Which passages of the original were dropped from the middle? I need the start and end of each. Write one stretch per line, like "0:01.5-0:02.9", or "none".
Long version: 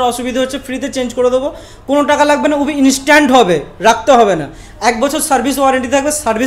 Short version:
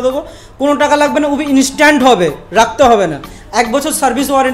none

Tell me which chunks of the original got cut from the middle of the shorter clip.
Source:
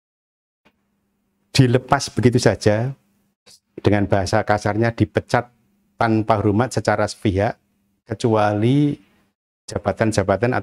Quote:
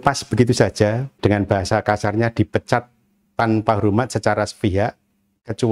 0:02.9-0:03.7

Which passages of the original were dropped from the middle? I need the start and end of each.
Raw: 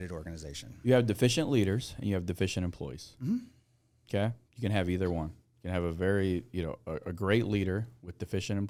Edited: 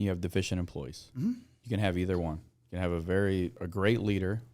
0:03.6-0:04.5
0:06.5-0:07.0

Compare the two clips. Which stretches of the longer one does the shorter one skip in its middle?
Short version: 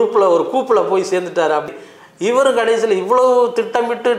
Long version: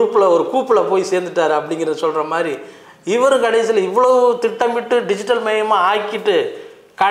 0:01.7-0:02.6

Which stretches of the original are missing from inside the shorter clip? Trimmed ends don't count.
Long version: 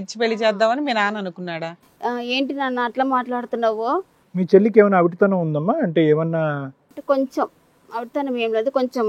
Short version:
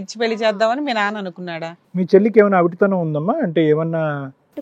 0:01.8-0:04.2

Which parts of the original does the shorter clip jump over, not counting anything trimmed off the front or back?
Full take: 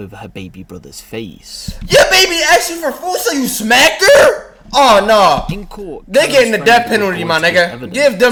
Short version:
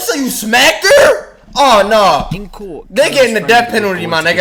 none

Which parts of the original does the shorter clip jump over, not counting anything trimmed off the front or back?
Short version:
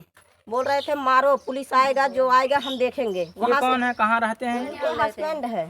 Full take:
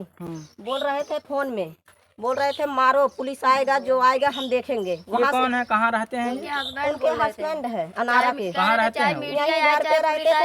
0:06.5-0:07.0

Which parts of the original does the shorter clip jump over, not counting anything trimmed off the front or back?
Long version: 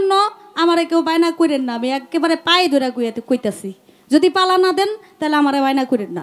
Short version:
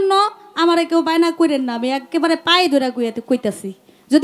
none

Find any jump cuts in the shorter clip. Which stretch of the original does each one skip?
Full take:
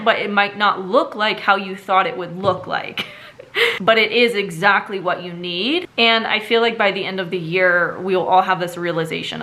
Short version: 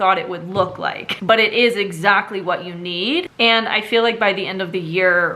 0:03.1-0:03.8

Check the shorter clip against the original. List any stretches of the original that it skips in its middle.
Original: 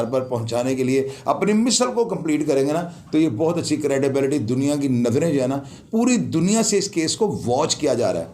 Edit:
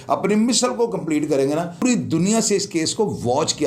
0:03.0-0:06.0

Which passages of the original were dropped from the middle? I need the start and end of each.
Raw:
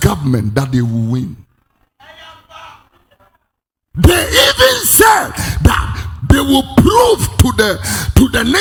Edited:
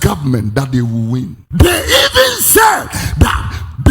0:01.4-0:03.8

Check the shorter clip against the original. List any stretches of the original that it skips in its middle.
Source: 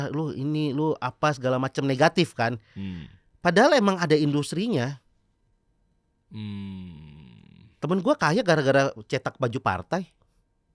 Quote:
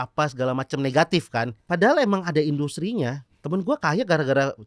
0:02.6-0:03.3
0:05.0-0:07.7

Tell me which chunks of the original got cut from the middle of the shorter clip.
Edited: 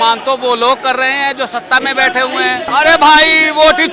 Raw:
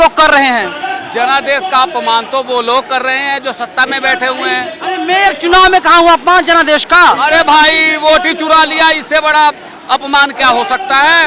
0:04.8-0:07.2

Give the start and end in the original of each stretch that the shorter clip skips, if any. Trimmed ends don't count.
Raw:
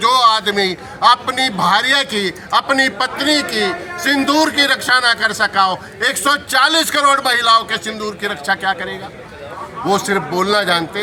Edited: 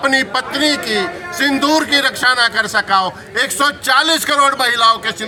none

